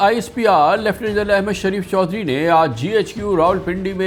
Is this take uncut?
yes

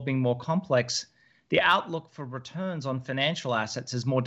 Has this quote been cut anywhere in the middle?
no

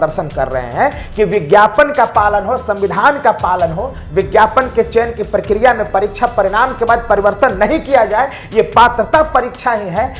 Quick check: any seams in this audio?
no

